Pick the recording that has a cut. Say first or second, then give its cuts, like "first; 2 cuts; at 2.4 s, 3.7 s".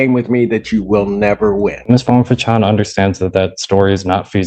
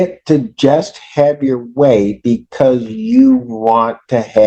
first; 1 cut; at 1.8 s